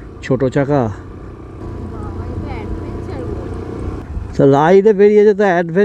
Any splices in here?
yes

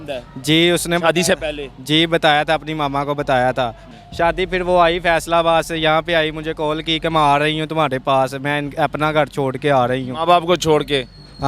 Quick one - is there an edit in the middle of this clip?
yes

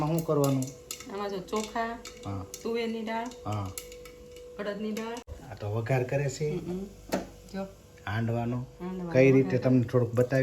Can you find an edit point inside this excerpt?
yes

